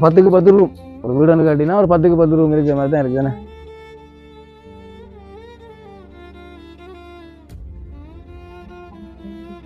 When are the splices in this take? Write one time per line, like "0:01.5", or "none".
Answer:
0:03.5